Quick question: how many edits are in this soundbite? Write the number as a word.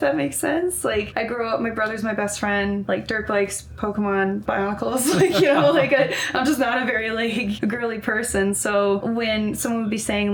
five